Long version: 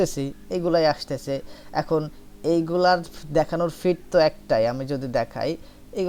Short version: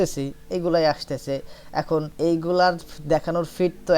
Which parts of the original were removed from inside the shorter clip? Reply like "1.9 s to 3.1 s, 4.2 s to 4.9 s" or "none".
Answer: 2.1 s to 2.4 s